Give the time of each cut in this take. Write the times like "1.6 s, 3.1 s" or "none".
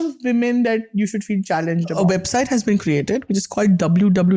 1.9 s

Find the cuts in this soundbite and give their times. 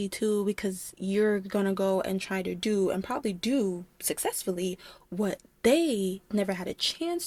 none

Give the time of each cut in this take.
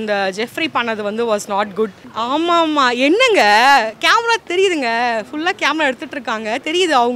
none

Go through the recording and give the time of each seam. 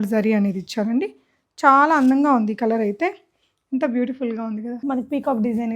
4.7 s

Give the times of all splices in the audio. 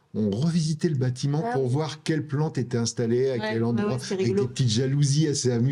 none

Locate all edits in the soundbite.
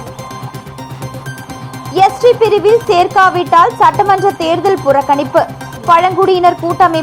1.9 s

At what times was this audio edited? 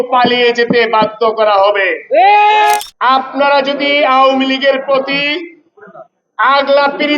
2.8 s

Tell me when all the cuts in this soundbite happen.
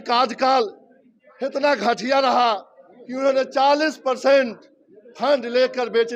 none

